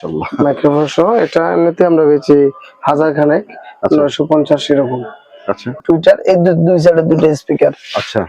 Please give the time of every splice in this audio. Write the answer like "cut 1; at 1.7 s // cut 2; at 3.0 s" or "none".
cut 1; at 5.8 s